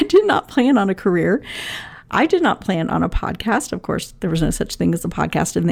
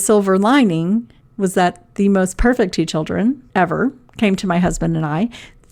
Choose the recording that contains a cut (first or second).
second